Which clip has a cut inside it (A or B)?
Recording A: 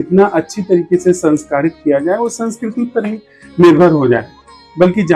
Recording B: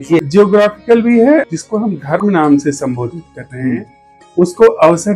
B